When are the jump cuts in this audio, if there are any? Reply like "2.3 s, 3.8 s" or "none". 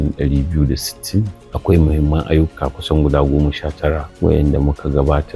1.4 s, 4.1 s